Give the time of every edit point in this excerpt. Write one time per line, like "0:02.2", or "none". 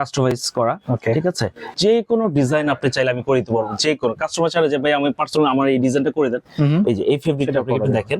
0:01.7